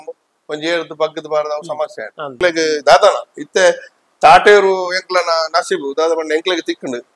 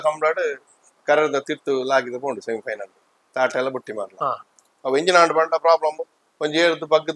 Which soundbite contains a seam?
first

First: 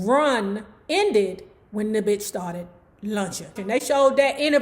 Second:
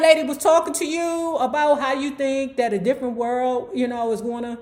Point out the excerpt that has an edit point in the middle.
first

